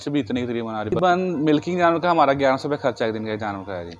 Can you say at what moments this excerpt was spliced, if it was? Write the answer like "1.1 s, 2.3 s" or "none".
1.0 s